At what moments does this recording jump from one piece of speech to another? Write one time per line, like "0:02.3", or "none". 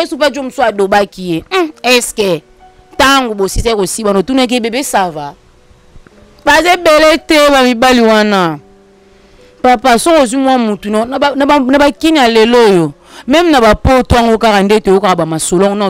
none

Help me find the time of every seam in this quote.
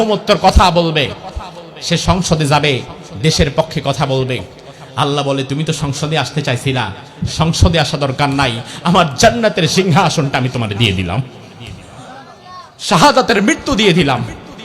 none

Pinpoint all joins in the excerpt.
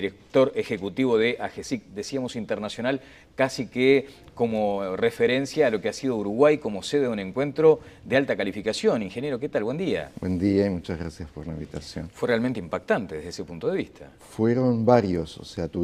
0:10.7

